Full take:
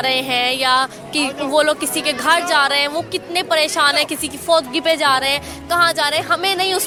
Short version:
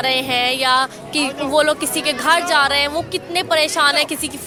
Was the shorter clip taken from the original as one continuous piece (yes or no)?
yes